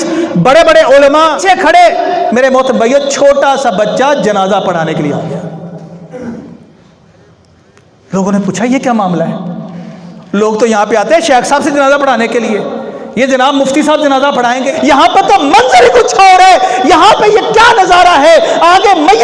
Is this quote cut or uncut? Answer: cut